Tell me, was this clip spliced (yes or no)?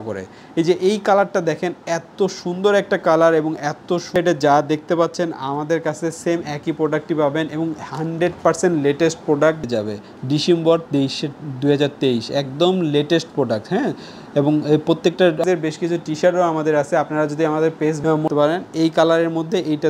yes